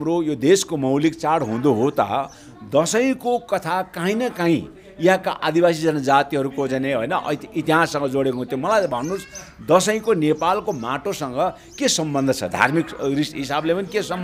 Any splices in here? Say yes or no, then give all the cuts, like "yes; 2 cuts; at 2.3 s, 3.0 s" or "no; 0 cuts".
no; 0 cuts